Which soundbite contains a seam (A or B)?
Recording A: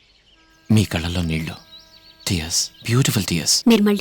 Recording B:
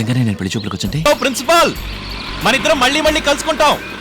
B